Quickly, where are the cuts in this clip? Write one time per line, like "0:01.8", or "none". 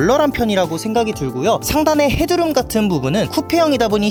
none